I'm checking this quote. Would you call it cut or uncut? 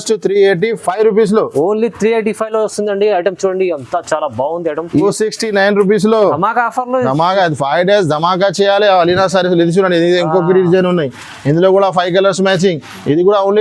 cut